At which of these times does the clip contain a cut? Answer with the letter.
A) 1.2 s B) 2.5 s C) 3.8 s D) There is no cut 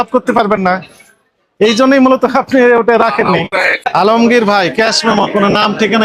C